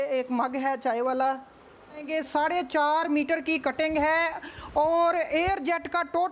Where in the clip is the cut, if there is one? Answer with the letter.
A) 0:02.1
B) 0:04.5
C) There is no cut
A